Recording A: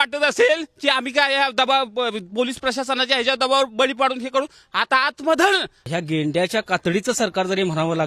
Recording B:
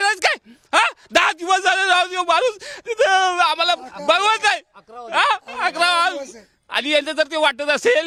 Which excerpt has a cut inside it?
A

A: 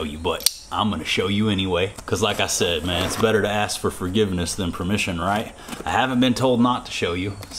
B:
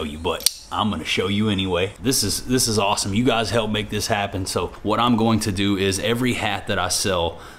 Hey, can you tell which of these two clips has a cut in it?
B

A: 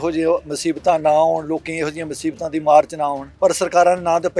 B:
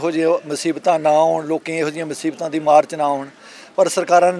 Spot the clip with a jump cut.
A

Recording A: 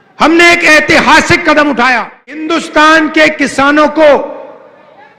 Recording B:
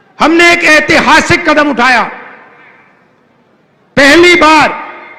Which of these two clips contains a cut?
A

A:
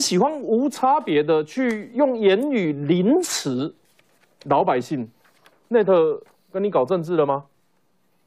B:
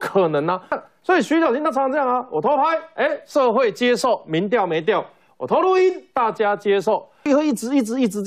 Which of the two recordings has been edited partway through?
B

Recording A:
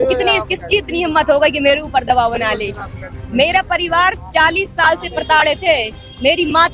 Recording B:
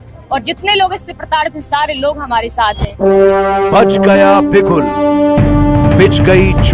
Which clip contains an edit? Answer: B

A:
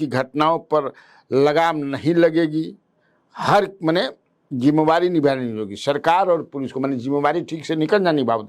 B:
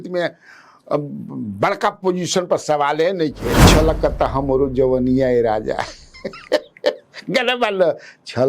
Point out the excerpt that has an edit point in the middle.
B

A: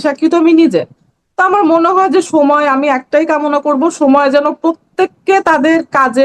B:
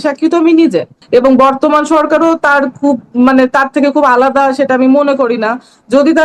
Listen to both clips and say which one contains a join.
B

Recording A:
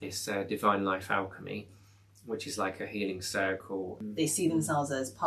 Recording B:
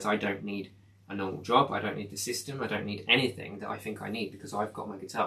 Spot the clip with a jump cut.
A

